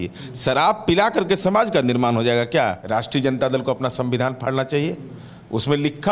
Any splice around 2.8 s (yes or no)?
yes